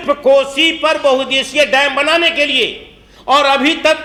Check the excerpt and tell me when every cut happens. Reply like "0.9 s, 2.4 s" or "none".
none